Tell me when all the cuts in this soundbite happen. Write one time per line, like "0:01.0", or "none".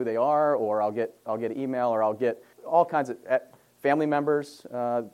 0:02.5